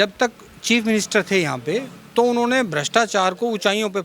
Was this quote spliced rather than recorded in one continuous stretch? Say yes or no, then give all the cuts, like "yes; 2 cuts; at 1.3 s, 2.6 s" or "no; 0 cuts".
no; 0 cuts